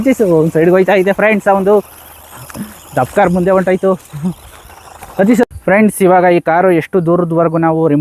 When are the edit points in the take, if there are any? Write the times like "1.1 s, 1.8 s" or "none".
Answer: 5.4 s